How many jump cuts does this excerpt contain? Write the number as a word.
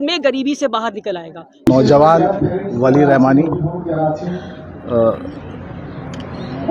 one